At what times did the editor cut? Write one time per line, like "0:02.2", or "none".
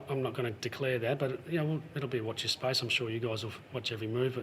none